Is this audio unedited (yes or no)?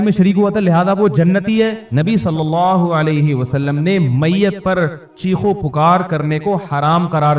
no